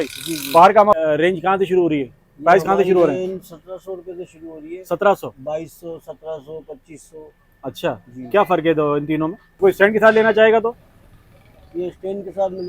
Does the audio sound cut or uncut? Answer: cut